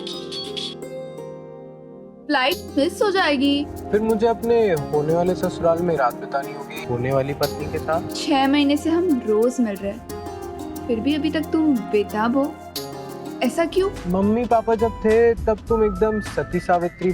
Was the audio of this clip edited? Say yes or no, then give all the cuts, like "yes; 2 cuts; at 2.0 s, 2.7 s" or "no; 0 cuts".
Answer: yes; 4 cuts; at 3.8 s, 6.8 s, 8.1 s, 14.0 s